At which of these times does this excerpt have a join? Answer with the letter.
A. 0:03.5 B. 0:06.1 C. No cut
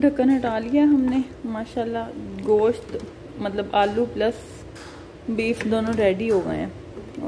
C